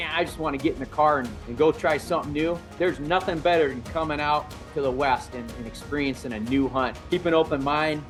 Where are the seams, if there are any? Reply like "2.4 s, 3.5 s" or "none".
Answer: none